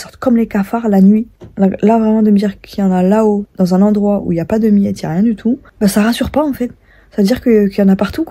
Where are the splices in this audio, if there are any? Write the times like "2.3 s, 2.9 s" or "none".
1.4 s, 3.5 s, 5.7 s